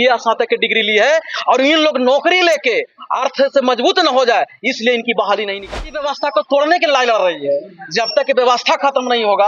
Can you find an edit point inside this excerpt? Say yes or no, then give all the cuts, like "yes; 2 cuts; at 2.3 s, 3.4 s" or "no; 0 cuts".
yes; 1 cut; at 5.8 s